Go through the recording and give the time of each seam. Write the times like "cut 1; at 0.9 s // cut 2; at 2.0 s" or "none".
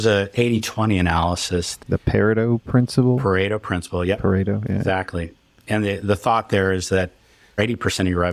cut 1; at 1.8 s // cut 2; at 7.6 s